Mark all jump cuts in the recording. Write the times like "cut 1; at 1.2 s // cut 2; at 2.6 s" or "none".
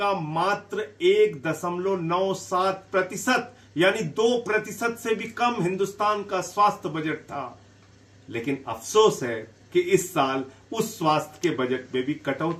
none